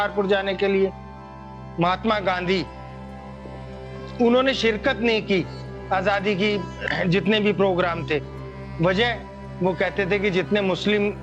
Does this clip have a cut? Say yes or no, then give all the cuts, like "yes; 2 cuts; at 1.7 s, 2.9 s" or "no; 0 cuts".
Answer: yes; 2 cuts; at 1.3 s, 6.8 s